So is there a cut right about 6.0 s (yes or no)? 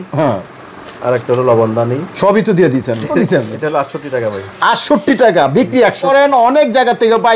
yes